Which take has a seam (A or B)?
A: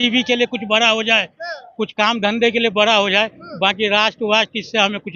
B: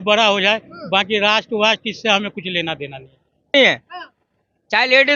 B